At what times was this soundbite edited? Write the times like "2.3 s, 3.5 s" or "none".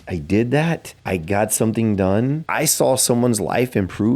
0.9 s, 2.4 s